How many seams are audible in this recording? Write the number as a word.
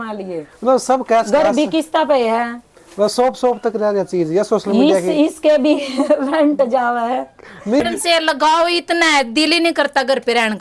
one